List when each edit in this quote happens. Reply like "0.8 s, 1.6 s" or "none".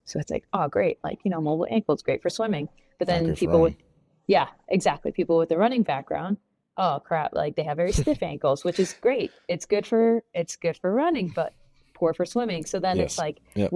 none